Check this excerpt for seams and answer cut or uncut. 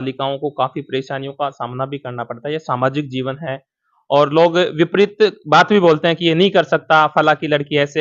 uncut